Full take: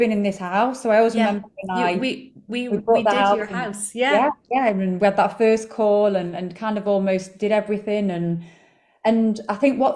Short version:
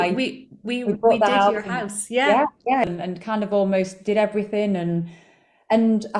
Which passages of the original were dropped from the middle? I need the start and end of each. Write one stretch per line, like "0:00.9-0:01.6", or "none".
0:04.7-0:06.2

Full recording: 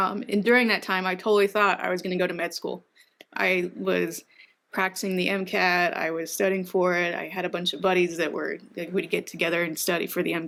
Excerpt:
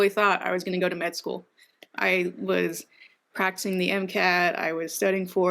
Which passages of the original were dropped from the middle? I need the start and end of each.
none

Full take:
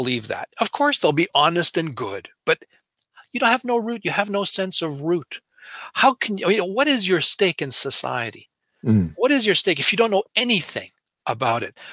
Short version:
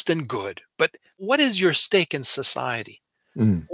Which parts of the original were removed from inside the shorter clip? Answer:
0:02.9-0:06.7

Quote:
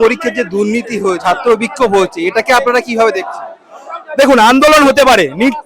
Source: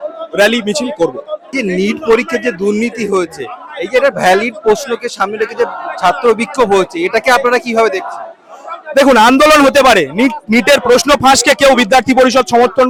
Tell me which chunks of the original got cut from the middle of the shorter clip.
0:03.3-0:06.0

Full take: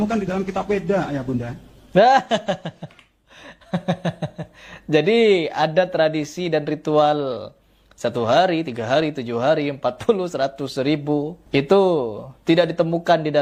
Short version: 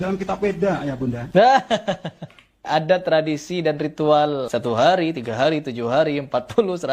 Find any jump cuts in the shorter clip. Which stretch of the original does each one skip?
0:01.5-0:01.8
0:03.2-0:05.5
0:07.3-0:08.0

